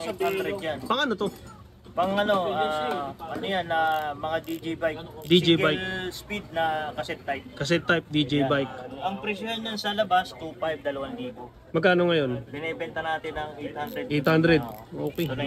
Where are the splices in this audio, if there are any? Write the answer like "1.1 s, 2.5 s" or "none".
none